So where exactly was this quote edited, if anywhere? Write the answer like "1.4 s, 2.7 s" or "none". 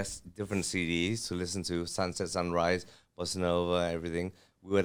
none

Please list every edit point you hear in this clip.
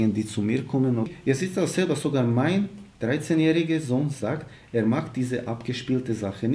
1.1 s

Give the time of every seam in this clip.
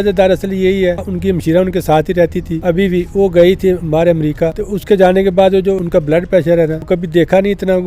1.1 s, 2.5 s, 4.7 s, 5.8 s, 6.8 s

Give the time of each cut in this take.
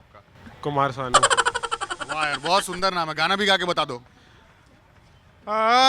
none

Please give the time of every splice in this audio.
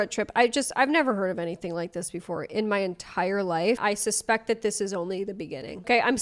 none

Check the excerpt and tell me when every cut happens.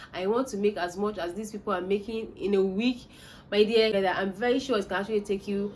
3.9 s

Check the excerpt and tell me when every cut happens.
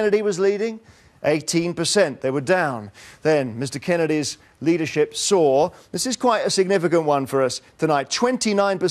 6.0 s

